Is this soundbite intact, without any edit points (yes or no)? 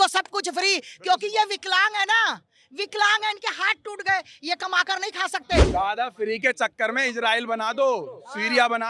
no